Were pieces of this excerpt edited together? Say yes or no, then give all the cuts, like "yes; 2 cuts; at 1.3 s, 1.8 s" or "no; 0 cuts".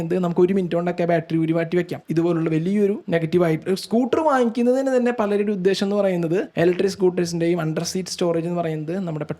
yes; 2 cuts; at 2.0 s, 6.5 s